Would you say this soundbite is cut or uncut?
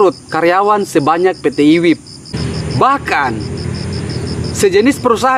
cut